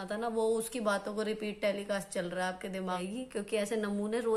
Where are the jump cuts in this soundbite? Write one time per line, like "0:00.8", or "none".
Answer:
0:03.0